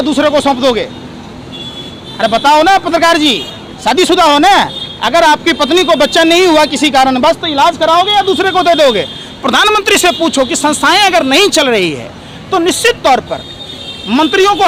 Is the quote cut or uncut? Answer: uncut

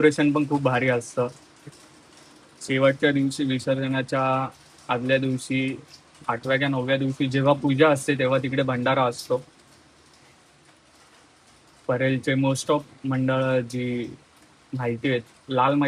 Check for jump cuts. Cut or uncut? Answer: uncut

